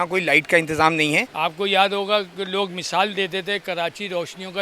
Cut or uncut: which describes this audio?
cut